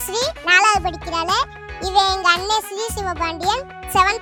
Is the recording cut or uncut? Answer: uncut